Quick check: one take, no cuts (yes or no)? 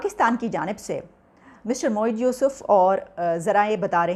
yes